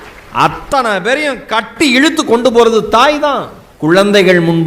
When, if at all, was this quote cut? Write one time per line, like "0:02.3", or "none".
0:03.7